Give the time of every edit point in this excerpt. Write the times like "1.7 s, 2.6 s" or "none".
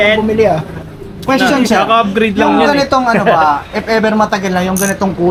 none